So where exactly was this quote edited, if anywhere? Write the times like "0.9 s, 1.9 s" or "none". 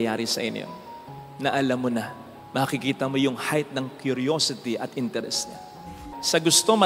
5.9 s